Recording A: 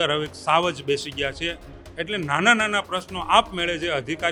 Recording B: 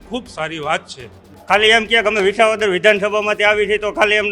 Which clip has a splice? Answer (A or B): B